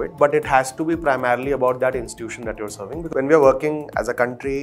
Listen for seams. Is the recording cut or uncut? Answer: cut